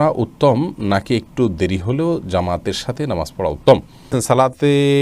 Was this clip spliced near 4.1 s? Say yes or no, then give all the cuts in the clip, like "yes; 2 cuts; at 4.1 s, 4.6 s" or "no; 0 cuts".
yes; 1 cut; at 4.1 s